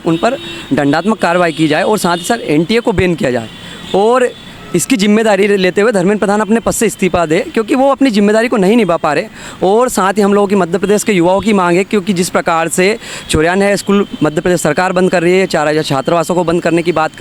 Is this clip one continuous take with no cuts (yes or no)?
yes